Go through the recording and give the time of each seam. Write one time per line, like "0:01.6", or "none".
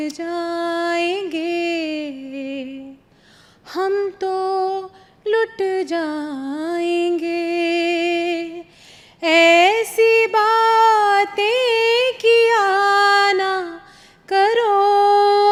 none